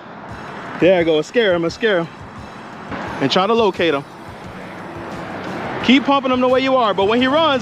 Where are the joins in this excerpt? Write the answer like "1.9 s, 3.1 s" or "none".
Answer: 2.9 s